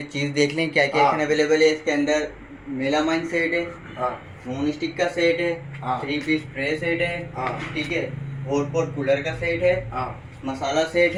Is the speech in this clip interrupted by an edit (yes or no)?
no